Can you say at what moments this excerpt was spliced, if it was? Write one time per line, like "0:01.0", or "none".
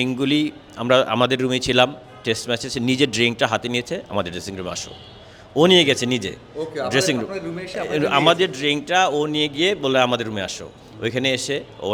none